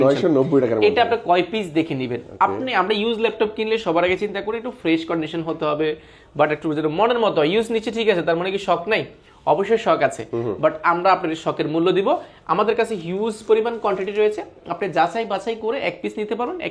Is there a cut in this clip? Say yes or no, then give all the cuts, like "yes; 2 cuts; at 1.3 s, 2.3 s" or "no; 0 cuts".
no; 0 cuts